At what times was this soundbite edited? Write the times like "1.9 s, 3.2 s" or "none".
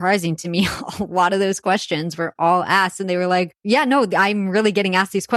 3.6 s

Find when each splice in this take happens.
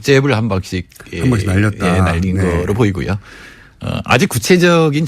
2.5 s

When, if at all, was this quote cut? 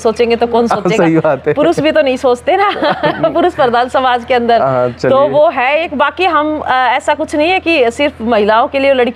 none

